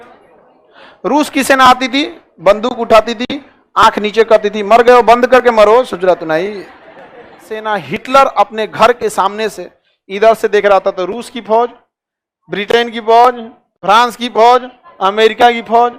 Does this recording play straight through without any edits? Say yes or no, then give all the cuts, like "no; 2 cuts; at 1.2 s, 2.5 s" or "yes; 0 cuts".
no; 1 cut; at 7.6 s